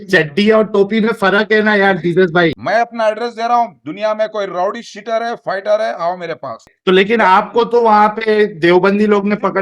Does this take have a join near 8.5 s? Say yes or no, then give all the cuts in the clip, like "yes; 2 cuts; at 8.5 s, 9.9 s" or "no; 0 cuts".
no; 2 cuts; at 2.6 s, 6.7 s